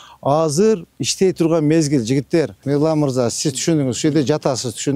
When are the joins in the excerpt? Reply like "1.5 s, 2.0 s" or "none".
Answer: 2.6 s